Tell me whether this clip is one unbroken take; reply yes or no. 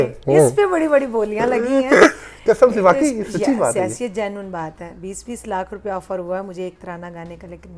yes